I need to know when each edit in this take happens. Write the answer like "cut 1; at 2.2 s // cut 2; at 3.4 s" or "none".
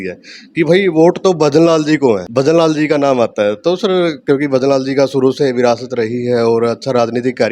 cut 1; at 2.3 s